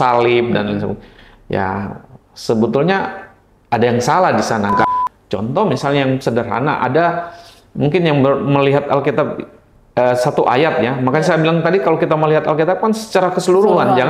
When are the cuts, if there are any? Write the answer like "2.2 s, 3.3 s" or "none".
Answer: 4.9 s